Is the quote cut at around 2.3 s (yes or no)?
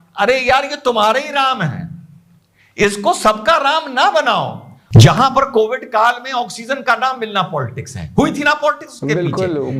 no